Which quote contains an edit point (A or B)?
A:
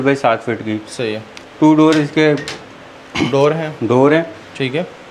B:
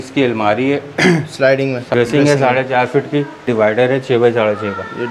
B